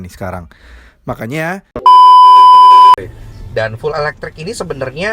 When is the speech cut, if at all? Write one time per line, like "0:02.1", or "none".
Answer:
0:01.7
0:03.0